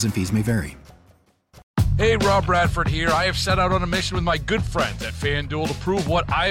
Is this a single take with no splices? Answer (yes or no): no